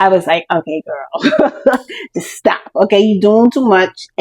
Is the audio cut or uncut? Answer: uncut